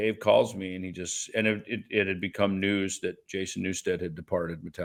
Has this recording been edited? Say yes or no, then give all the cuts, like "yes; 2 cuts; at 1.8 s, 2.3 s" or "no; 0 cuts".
no; 0 cuts